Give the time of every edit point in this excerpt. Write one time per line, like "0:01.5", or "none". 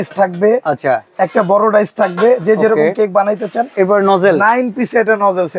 none